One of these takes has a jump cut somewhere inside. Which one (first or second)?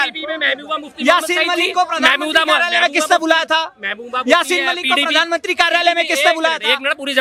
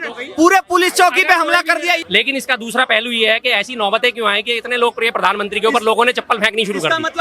second